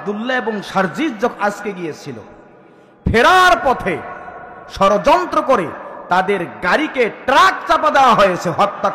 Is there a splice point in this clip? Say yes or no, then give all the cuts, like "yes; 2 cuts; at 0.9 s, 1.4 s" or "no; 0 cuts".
no; 0 cuts